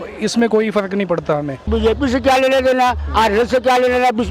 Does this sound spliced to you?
yes; 1 cut; at 1.7 s

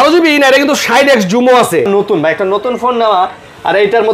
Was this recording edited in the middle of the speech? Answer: yes; 1 cut; at 1.9 s

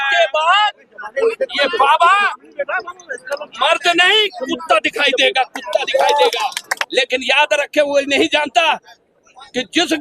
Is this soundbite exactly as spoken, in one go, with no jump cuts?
no; 1 cut; at 6.7 s

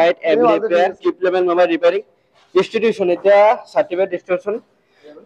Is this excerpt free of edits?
yes; 0 cuts

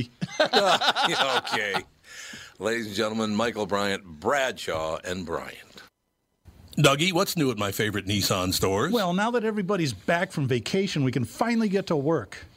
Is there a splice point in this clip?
yes; 1 cut; at 6.6 s

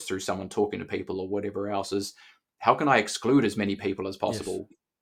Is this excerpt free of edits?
yes; 0 cuts

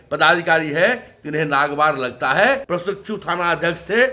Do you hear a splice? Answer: yes; 1 cut; at 2.6 s

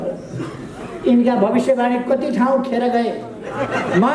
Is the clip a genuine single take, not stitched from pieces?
yes; 0 cuts

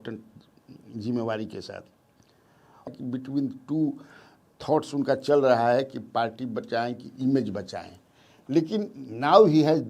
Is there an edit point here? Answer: yes; 1 cut; at 2.9 s

